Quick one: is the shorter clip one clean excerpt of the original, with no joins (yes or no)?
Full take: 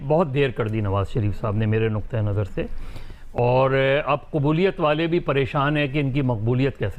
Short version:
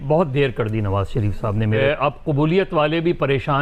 no